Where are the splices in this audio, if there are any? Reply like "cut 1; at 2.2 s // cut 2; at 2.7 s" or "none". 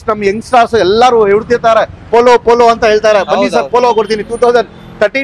none